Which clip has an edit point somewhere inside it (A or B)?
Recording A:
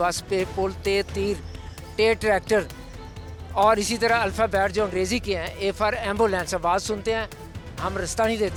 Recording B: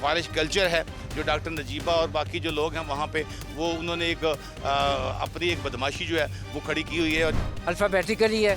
B